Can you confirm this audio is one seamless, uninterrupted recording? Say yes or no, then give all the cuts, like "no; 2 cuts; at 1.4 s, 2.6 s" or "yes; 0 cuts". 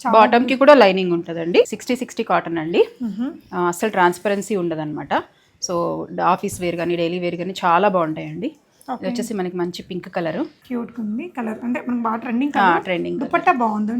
no; 2 cuts; at 1.7 s, 10.6 s